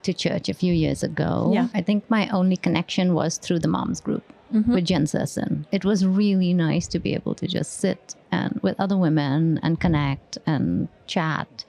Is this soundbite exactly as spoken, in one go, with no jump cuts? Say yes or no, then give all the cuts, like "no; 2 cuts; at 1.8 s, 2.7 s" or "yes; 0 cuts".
no; 2 cuts; at 1.8 s, 5.6 s